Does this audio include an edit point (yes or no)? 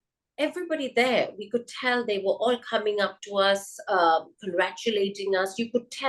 no